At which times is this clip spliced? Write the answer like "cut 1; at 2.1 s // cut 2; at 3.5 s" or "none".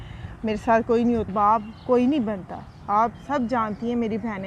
cut 1; at 1.3 s